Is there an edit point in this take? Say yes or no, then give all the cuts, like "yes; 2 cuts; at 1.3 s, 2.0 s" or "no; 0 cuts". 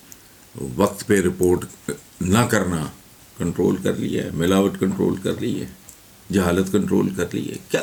no; 0 cuts